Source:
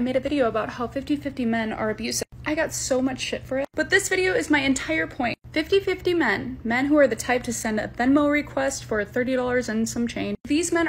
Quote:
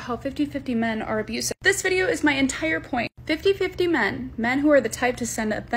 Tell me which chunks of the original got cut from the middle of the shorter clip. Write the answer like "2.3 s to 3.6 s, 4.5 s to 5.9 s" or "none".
2.3 s to 3.9 s